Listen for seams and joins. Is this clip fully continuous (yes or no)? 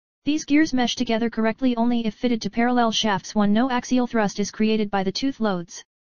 no